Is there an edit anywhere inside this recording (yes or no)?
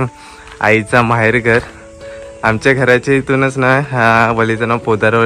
no